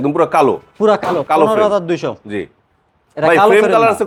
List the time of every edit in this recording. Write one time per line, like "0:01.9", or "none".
none